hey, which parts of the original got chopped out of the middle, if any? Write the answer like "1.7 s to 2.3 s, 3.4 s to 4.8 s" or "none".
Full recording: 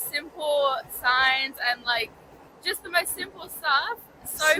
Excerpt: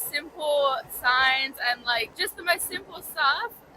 2.1 s to 2.6 s